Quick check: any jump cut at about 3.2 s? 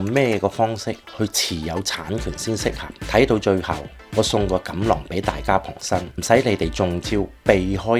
no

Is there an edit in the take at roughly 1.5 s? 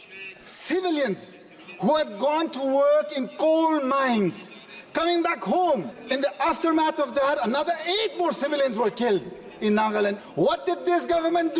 no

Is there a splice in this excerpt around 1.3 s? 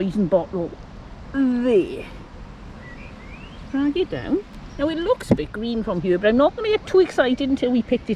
no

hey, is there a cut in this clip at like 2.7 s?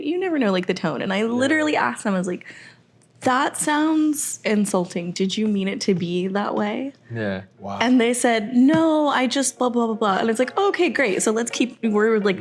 no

